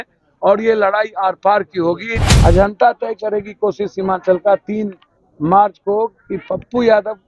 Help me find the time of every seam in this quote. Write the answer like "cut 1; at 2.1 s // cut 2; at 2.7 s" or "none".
cut 1; at 2.2 s